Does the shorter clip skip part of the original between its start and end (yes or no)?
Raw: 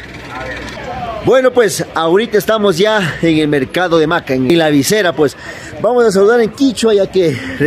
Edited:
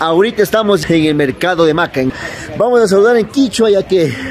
yes